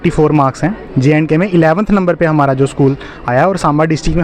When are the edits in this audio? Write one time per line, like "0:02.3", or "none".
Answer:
none